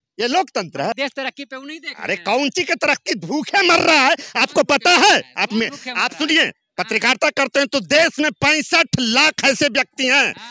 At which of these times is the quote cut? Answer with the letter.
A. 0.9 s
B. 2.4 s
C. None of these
A